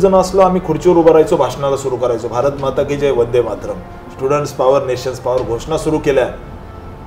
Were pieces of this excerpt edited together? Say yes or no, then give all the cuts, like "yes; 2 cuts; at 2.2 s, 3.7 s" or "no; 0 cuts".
no; 0 cuts